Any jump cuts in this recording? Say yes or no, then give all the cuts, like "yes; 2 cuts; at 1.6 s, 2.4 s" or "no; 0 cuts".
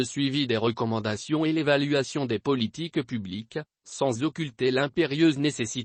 no; 0 cuts